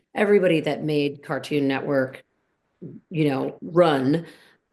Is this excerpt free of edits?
yes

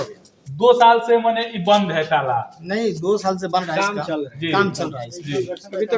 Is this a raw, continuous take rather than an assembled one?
yes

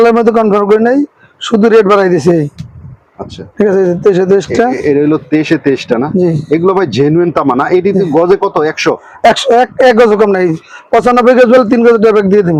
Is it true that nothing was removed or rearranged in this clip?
yes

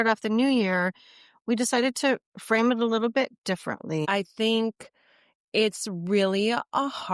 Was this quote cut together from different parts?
yes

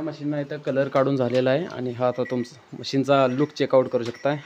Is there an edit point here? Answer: no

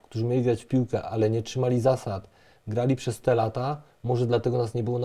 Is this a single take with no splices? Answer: yes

